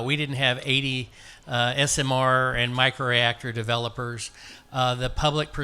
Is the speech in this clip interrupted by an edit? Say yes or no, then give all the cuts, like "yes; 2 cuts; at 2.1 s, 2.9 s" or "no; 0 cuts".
no; 0 cuts